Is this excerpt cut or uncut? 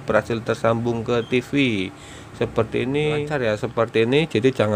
cut